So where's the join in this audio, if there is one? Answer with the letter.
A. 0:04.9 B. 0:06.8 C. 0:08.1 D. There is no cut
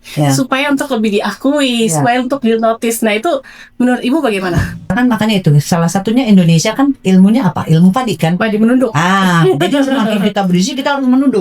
A